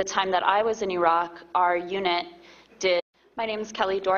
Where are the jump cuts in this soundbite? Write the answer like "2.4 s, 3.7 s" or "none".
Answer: none